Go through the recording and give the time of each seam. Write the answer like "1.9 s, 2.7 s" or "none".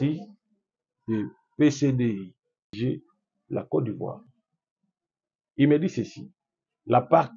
2.8 s